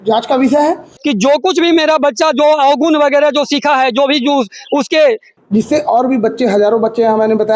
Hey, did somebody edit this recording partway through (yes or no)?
yes